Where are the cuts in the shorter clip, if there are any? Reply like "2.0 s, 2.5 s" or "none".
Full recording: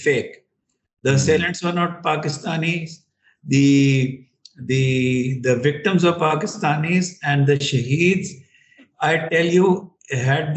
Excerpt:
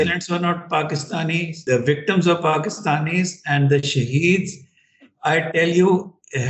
1.6 s